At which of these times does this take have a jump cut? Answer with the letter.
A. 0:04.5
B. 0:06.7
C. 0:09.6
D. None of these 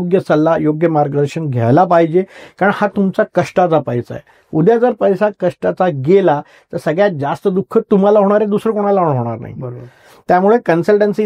D